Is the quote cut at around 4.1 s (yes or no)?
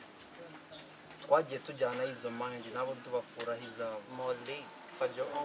yes